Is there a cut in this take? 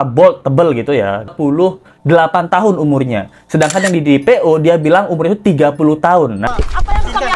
yes; 2 cuts; at 1.3 s, 6.4 s

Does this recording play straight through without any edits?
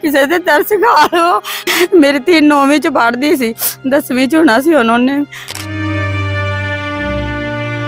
no; 2 cuts; at 1.5 s, 5.4 s

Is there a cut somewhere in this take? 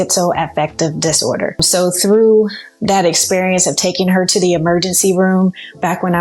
yes; 1 cut; at 1.7 s

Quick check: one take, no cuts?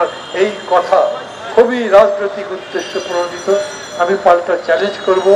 yes; 0 cuts

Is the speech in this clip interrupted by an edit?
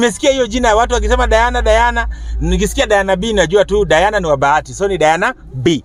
no; 0 cuts

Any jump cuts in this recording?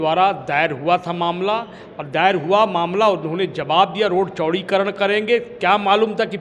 no; 0 cuts

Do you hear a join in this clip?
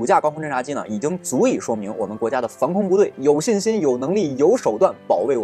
no; 0 cuts

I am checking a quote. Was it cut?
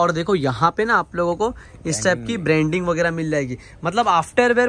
no; 0 cuts

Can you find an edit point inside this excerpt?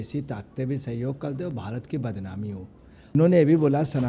yes; 1 cut; at 2.9 s

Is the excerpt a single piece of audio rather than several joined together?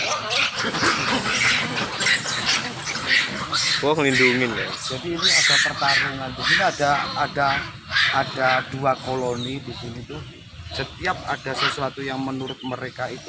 yes; 0 cuts

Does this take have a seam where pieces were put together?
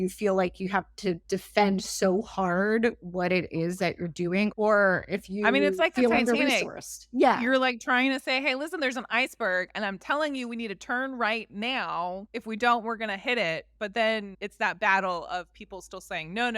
yes; 4 cuts; at 1.2 s, 4.5 s, 12.3 s, 14.4 s

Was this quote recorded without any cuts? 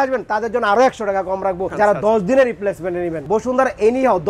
no; 2 cuts; at 1.7 s, 3.2 s

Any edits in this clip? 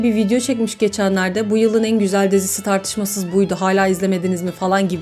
no; 0 cuts

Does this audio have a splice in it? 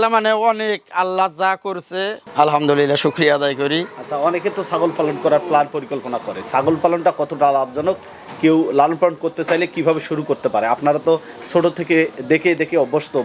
no; 0 cuts

